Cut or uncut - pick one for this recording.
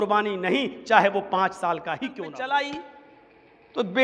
cut